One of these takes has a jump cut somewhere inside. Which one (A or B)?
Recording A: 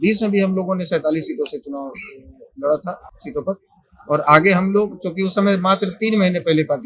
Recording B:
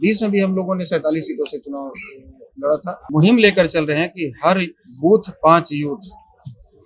B